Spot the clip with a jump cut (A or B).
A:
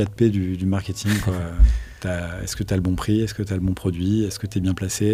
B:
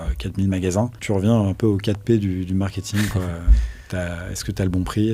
B